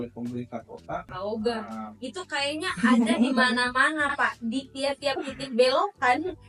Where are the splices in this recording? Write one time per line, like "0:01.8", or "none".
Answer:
0:01.1